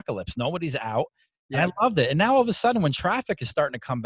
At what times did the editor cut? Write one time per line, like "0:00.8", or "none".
none